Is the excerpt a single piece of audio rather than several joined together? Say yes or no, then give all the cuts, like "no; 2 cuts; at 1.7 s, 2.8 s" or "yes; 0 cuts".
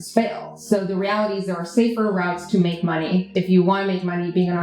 no; 1 cut; at 3.3 s